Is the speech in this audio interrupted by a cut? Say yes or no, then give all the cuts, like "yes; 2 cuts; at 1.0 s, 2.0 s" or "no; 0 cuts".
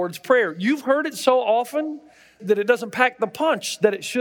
yes; 1 cut; at 2.3 s